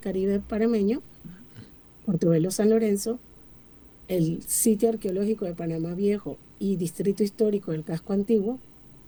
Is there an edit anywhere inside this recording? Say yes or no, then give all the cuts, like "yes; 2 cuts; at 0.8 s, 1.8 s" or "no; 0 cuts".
no; 0 cuts